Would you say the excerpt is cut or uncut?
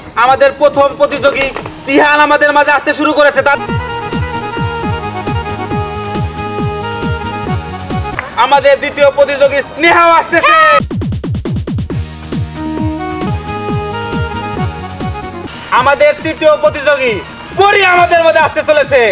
cut